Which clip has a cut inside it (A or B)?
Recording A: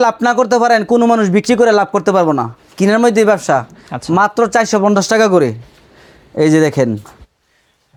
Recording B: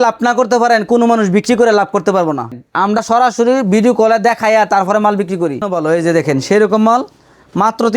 B